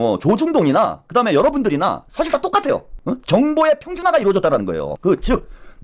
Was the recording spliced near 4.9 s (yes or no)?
yes